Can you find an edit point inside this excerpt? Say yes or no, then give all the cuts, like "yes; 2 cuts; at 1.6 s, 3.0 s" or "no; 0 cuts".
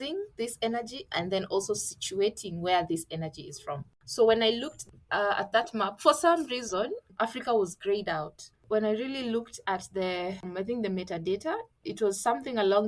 yes; 5 cuts; at 3.9 s, 7.0 s, 8.6 s, 10.5 s, 11.8 s